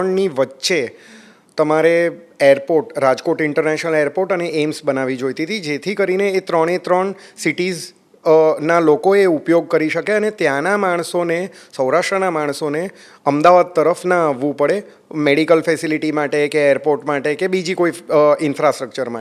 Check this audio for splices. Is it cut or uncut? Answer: uncut